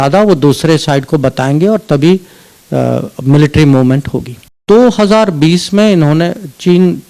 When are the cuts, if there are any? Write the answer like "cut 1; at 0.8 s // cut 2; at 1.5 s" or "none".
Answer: cut 1; at 4.6 s